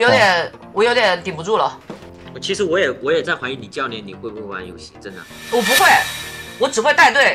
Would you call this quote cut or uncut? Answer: uncut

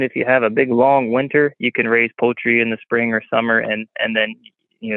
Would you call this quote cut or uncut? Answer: uncut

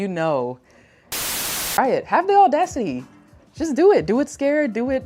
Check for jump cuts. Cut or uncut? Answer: cut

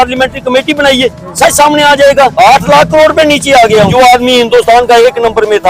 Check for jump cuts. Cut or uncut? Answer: cut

